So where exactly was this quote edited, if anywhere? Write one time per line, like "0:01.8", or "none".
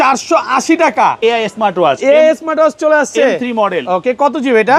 0:01.2